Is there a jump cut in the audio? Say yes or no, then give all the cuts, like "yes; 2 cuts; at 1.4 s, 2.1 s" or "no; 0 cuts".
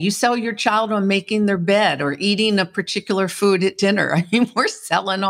no; 0 cuts